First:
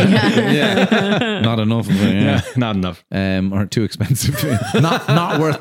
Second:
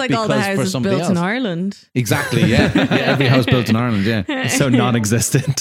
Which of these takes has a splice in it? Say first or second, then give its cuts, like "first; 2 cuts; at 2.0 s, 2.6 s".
second; 1 cut; at 4.6 s